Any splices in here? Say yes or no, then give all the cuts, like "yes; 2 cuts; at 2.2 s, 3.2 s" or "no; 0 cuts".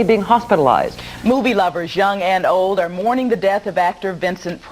yes; 1 cut; at 1.0 s